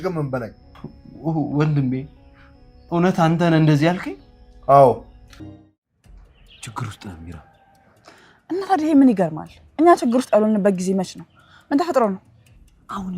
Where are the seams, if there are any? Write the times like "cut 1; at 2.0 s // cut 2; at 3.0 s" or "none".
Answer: cut 1; at 5.4 s